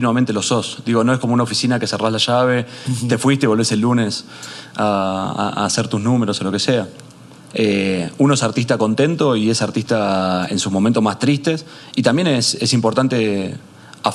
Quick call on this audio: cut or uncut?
uncut